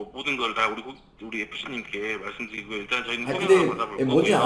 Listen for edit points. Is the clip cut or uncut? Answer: cut